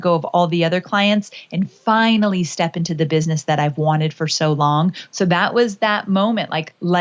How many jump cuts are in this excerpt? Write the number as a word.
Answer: one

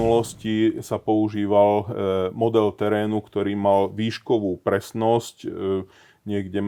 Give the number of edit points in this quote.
zero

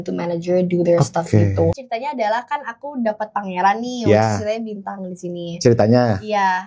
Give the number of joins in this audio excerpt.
one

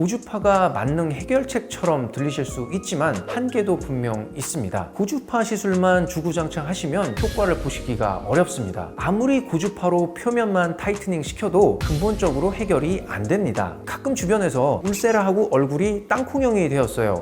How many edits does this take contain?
three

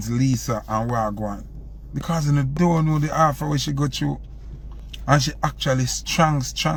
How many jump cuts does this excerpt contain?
zero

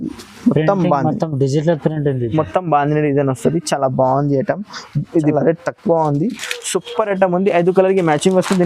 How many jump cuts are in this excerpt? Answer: one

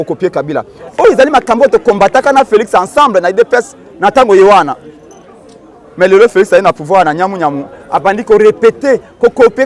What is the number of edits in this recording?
zero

